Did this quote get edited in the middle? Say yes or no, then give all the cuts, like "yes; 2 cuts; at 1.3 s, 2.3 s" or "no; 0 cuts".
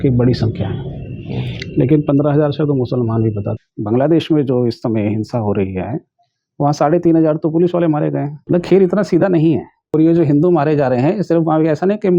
yes; 3 cuts; at 3.5 s, 8.3 s, 9.9 s